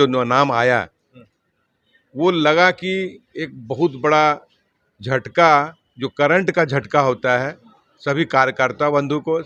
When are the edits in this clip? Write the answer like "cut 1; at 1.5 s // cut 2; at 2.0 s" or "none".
none

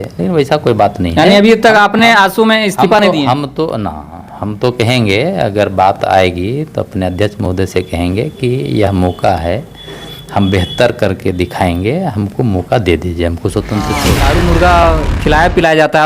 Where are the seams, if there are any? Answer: cut 1; at 14.1 s

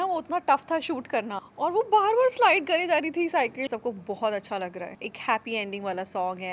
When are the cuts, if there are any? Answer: cut 1; at 1.4 s // cut 2; at 3.7 s // cut 3; at 5.0 s

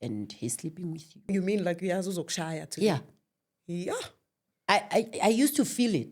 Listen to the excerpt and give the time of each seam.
cut 1; at 1.3 s

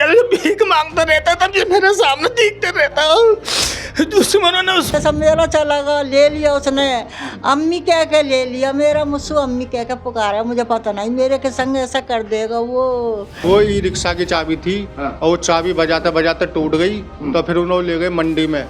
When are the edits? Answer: cut 1; at 4.9 s // cut 2; at 13.3 s

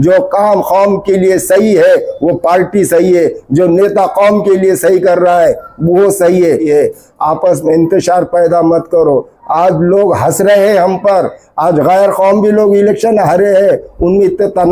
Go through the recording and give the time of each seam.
cut 1; at 6.6 s

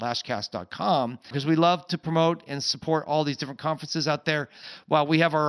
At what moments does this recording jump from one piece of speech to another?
cut 1; at 1.4 s

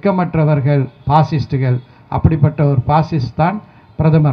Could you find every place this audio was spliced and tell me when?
none

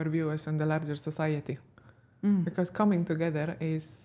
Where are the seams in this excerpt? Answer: none

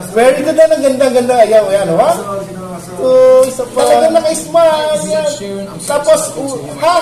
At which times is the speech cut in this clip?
cut 1; at 3.8 s

